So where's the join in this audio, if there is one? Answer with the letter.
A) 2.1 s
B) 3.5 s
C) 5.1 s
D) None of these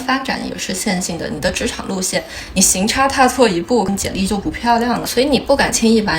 C